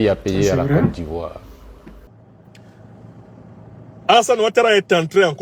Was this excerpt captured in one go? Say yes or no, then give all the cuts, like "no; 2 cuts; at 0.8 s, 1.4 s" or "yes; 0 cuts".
no; 1 cut; at 2.1 s